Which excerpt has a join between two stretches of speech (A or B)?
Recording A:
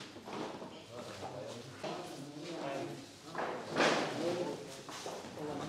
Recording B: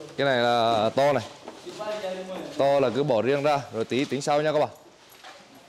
A